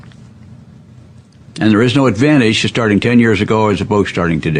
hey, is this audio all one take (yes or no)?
yes